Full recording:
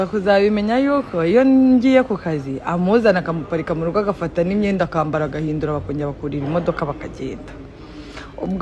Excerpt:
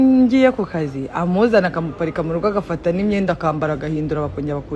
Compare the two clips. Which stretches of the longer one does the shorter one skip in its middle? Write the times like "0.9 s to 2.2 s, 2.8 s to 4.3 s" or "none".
none